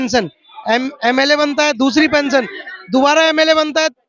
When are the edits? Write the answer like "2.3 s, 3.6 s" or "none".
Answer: none